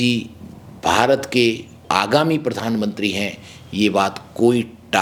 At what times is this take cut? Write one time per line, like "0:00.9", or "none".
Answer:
none